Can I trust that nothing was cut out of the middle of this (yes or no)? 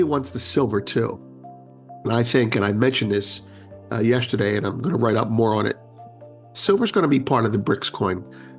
yes